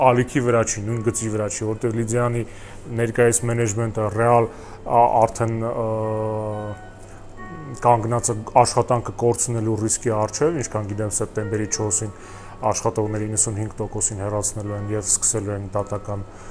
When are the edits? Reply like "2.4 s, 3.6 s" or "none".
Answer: none